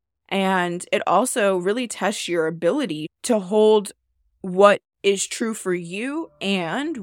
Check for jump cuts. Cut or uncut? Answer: cut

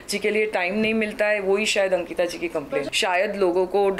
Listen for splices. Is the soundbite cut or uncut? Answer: cut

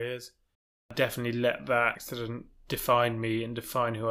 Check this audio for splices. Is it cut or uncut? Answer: cut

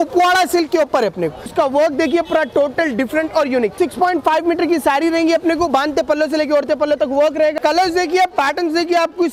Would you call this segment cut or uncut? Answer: cut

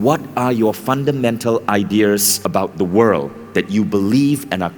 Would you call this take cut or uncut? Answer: cut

